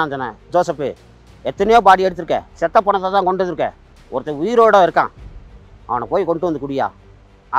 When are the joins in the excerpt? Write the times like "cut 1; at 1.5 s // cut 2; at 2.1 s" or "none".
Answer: cut 1; at 2.5 s